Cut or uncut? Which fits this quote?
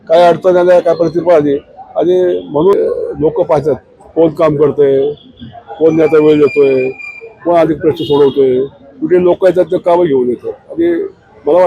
cut